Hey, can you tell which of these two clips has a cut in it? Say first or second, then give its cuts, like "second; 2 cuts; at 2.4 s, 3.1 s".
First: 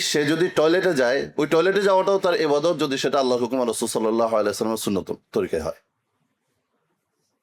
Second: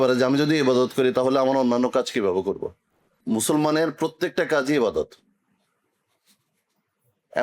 second; 1 cut; at 3.2 s